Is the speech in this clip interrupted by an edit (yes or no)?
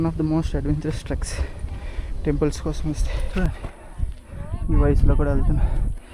yes